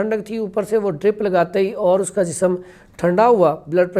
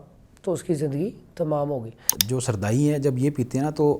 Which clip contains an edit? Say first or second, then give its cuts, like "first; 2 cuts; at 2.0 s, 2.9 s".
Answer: second; 1 cut; at 2.2 s